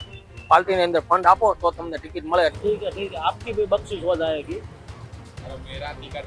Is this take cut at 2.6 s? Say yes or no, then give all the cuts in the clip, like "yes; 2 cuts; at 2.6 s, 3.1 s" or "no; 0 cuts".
yes; 1 cut; at 2.6 s